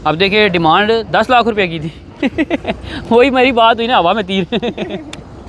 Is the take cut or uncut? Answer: uncut